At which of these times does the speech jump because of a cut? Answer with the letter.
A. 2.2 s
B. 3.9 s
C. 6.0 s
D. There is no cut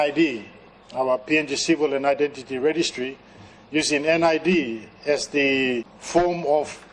C